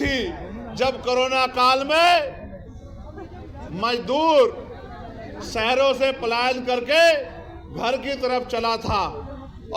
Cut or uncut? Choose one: uncut